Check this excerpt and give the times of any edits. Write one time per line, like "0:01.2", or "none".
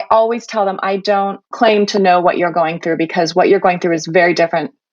0:01.5

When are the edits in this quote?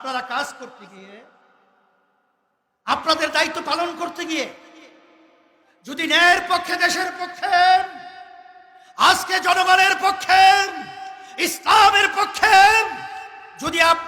none

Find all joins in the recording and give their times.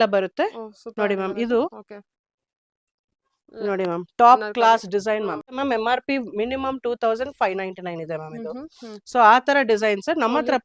0:05.5

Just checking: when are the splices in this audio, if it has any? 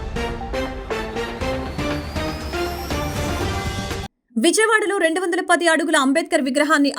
0:04.0

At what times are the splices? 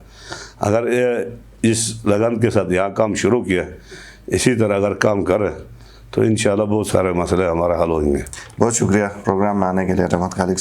none

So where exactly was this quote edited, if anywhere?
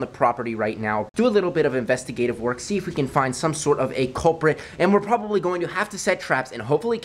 0:01.1

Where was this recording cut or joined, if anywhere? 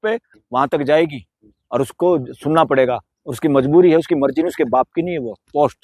none

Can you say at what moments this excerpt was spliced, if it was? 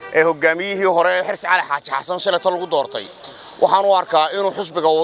none

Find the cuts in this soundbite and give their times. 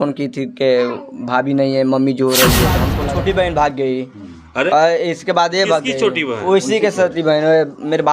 0:02.9

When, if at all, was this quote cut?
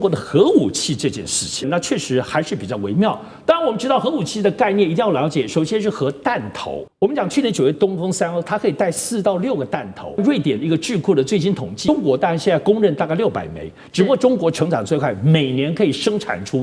0:01.7
0:06.8
0:07.7
0:10.2
0:11.9

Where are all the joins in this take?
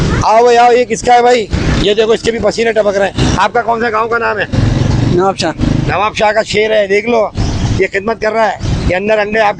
none

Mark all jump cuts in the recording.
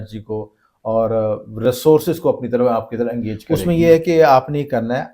0:03.4

